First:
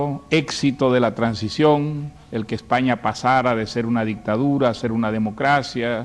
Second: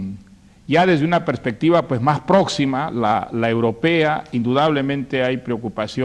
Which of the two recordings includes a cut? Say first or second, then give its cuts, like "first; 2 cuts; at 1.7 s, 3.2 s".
first; 1 cut; at 2.8 s